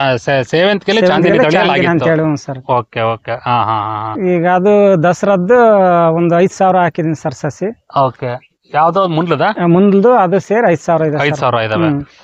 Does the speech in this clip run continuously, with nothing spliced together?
yes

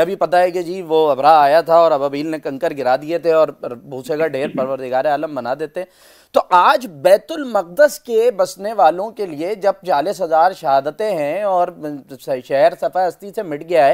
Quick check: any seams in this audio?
no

